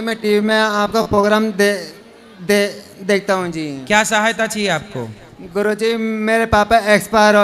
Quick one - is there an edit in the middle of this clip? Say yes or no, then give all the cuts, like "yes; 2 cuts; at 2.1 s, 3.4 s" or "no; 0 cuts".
no; 0 cuts